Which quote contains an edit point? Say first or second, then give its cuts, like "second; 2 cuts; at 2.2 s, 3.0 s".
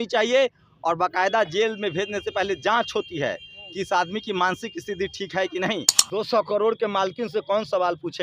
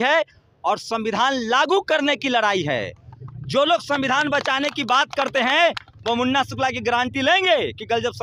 first; 1 cut; at 5.9 s